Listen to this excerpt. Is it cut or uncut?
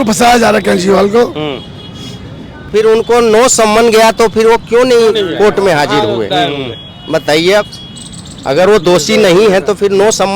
cut